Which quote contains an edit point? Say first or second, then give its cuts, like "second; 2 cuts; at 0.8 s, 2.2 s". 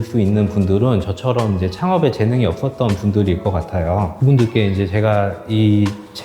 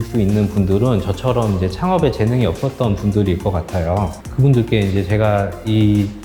first; 1 cut; at 4.1 s